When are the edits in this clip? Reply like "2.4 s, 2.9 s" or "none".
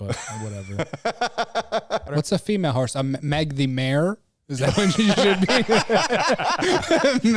2.1 s